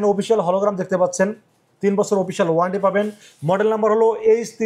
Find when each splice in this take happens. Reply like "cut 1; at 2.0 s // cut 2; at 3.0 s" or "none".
none